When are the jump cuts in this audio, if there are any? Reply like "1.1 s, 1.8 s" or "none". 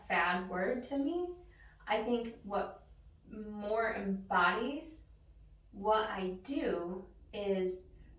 7.2 s